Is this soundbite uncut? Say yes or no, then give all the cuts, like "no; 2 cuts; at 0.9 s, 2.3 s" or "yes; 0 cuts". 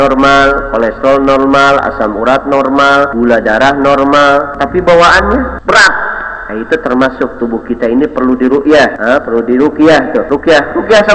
no; 5 cuts; at 3.1 s, 4.6 s, 5.6 s, 9.0 s, 10.3 s